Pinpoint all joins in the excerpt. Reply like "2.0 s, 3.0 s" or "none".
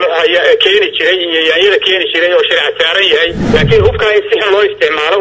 3.4 s